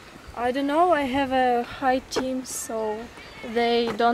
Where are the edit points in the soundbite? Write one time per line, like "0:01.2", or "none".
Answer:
0:01.3